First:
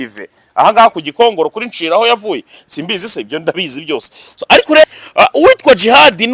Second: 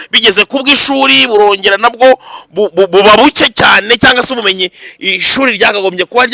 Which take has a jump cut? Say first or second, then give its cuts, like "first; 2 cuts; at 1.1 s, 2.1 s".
first; 1 cut; at 4.8 s